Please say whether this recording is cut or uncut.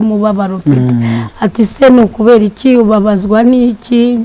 uncut